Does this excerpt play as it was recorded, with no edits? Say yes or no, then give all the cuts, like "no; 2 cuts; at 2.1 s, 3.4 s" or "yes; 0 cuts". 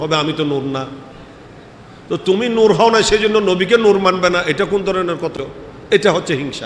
no; 1 cut; at 5.4 s